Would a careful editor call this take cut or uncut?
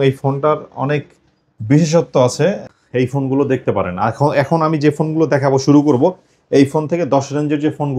cut